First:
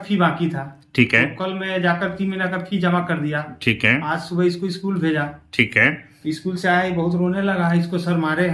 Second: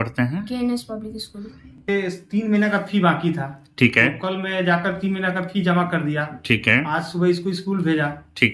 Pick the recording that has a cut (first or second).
second